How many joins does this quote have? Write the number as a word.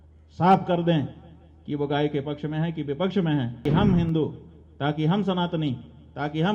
one